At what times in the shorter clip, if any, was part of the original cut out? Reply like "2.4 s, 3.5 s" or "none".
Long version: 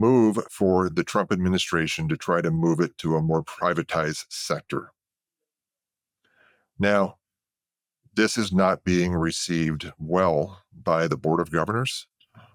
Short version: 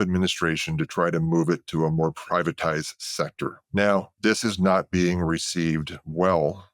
3.6 s, 4.1 s